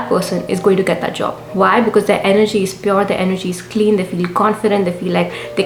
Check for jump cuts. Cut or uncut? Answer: uncut